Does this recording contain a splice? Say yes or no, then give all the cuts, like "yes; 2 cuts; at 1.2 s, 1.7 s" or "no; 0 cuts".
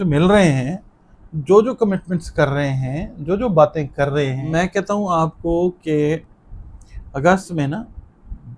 yes; 1 cut; at 4.4 s